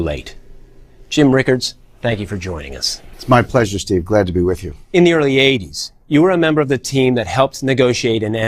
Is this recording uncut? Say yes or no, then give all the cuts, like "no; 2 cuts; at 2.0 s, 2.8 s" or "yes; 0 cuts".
yes; 0 cuts